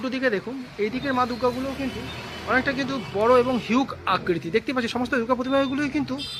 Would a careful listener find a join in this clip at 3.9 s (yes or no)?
no